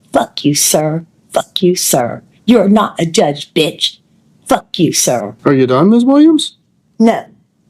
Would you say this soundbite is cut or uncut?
cut